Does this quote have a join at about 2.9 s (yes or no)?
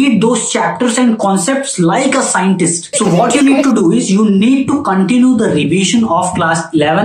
yes